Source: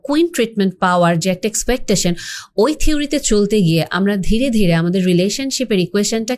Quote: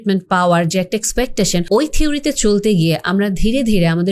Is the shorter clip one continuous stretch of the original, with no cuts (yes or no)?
no